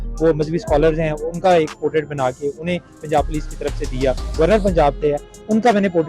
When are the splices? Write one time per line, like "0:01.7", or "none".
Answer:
0:04.3